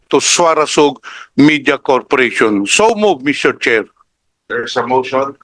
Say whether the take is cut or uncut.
uncut